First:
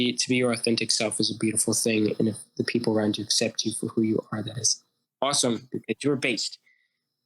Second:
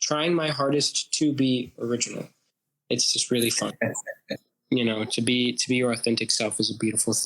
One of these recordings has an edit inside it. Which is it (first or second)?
second